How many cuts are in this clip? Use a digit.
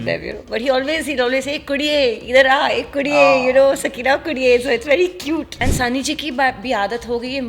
1